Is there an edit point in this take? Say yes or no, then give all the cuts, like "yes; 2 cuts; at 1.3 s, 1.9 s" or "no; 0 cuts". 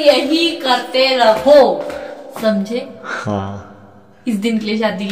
no; 0 cuts